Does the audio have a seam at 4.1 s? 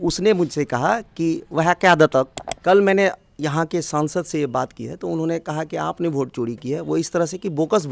no; 1 cut; at 2.4 s

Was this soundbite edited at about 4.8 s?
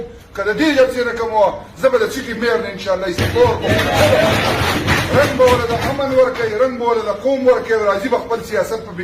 yes; 1 cut; at 4.8 s

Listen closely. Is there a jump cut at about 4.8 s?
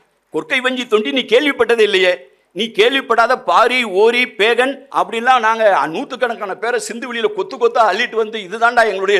yes; 1 cut; at 4.8 s

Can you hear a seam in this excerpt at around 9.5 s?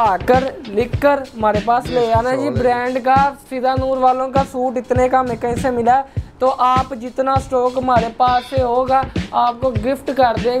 no; 0 cuts

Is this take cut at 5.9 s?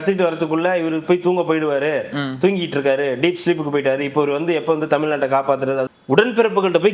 yes; 1 cut; at 5.9 s

